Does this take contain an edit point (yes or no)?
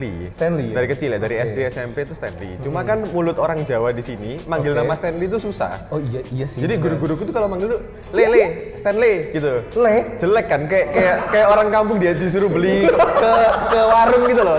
no